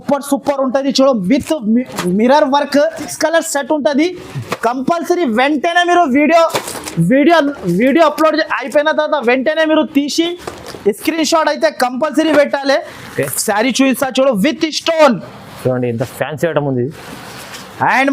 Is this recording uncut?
no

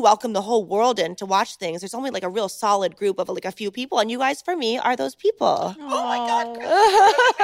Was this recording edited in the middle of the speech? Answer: no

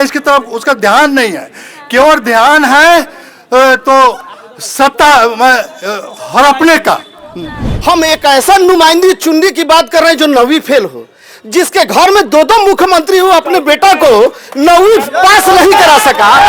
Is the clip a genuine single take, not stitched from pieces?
no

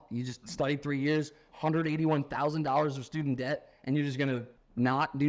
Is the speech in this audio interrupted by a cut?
no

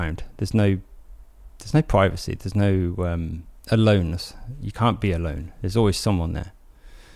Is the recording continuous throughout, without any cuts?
yes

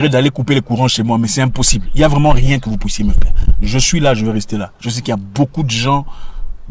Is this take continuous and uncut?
yes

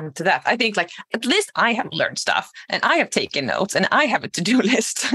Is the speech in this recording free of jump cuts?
no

